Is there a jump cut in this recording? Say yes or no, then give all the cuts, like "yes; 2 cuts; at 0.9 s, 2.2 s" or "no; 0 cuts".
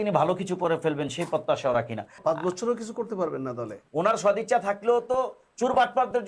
yes; 2 cuts; at 2.1 s, 3.8 s